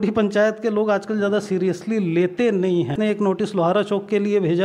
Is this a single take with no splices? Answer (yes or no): no